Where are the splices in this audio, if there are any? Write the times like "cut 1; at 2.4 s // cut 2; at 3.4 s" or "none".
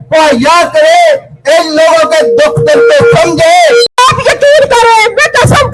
cut 1; at 3.9 s